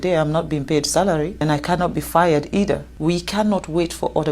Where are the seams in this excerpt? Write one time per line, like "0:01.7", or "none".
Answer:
0:01.4
0:02.9